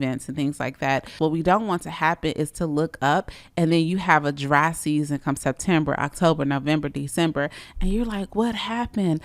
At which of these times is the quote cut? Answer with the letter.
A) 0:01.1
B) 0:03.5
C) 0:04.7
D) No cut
A